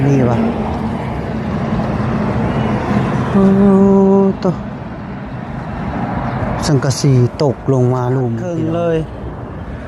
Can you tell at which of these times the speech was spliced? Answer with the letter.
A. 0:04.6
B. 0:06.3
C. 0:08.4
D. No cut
C